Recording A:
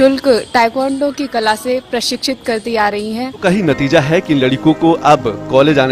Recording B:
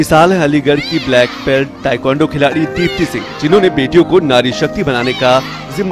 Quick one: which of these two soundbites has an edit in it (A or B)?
A